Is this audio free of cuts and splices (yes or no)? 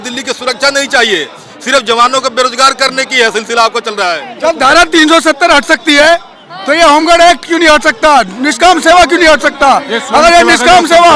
no